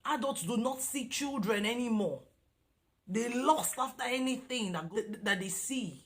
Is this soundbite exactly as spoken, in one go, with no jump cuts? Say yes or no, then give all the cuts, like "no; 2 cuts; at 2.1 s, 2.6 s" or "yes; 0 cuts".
no; 1 cut; at 4.9 s